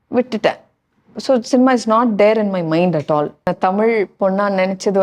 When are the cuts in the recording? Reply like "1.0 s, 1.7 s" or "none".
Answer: 3.5 s